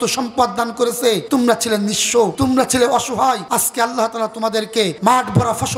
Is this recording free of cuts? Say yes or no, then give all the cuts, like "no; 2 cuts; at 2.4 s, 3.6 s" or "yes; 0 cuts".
no; 4 cuts; at 1.2 s, 2.3 s, 3.4 s, 5.0 s